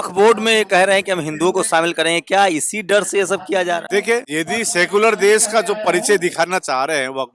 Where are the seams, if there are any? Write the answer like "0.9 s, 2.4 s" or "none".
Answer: 4.0 s